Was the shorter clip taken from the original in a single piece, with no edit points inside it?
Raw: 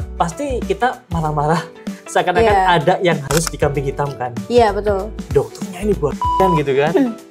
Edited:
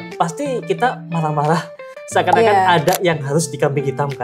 yes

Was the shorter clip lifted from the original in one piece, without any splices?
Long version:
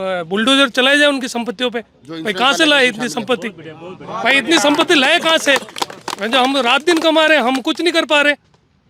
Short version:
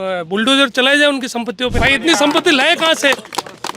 no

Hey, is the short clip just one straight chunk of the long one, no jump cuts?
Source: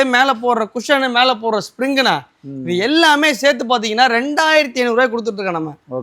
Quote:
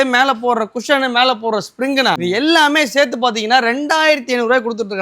no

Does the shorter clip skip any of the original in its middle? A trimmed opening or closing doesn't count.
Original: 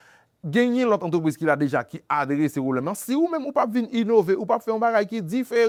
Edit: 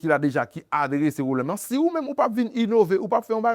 no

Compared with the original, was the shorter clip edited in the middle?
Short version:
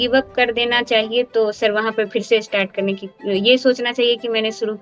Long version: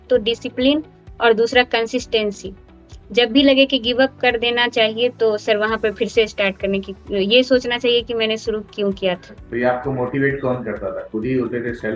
no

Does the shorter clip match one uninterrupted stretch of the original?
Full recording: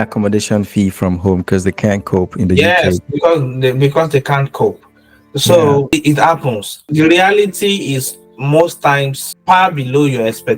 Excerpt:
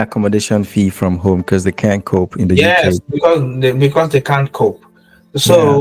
yes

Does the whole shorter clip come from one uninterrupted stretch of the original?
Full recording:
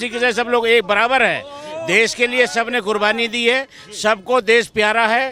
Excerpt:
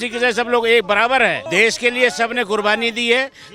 no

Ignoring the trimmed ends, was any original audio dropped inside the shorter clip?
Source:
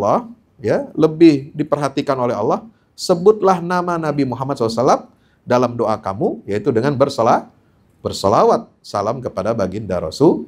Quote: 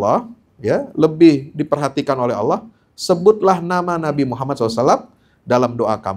no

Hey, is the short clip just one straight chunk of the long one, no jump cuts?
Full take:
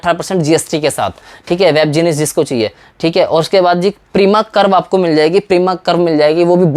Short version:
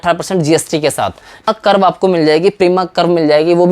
no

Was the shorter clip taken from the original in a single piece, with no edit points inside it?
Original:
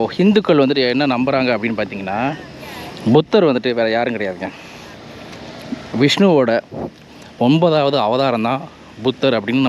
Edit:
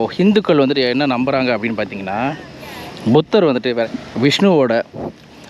no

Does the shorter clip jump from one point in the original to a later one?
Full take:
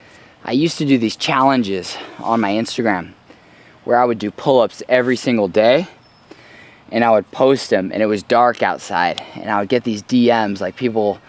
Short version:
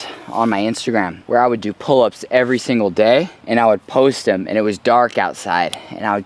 yes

